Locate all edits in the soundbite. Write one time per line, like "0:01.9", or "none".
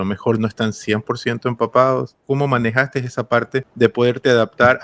0:02.2
0:03.7